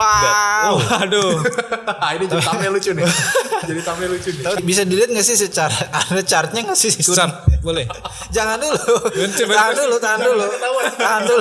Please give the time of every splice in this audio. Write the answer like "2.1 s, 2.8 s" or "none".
4.6 s